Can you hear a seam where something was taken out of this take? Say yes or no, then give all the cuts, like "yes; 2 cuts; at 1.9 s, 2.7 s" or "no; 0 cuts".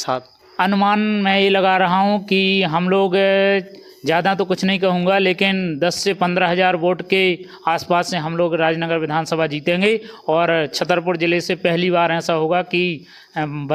no; 0 cuts